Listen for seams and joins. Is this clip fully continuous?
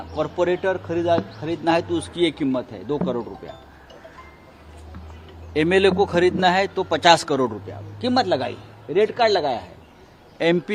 yes; 0 cuts

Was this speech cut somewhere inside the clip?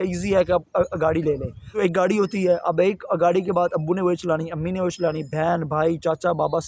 yes; 1 cut; at 1.6 s

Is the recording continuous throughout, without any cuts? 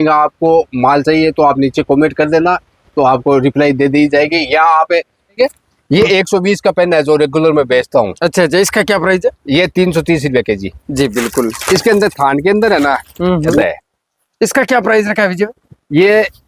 no; 2 cuts; at 5.4 s, 13.6 s

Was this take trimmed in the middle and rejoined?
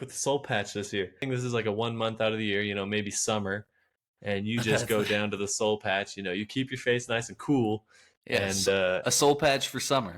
yes; 1 cut; at 1.2 s

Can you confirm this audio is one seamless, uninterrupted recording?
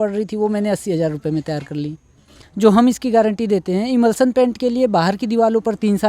no; 1 cut; at 2.4 s

